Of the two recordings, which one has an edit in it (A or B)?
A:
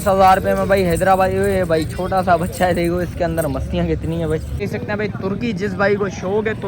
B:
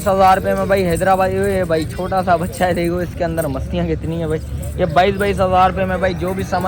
A